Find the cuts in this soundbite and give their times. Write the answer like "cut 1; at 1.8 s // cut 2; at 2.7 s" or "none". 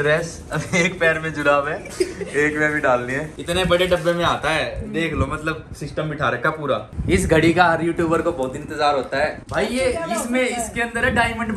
cut 1; at 3.3 s // cut 2; at 6.8 s // cut 3; at 9.3 s